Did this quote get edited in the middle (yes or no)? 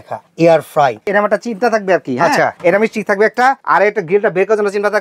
yes